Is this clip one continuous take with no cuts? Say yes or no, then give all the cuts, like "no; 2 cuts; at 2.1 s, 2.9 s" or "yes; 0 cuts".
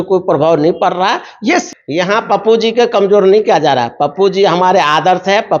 no; 1 cut; at 1.7 s